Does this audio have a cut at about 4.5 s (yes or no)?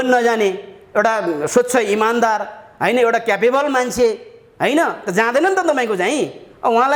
no